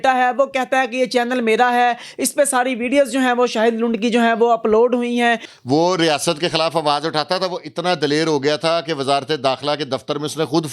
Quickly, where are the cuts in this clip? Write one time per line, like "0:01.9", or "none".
0:05.5